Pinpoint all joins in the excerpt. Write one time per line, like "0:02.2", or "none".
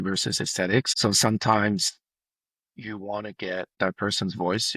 0:00.9
0:03.7